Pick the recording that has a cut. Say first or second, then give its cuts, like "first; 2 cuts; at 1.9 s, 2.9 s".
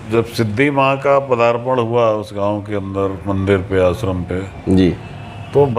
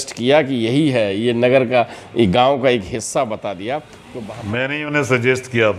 second; 1 cut; at 4.0 s